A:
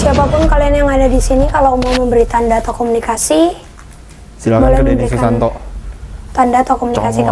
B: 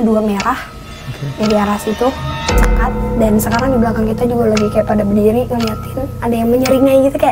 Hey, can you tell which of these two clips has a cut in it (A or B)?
B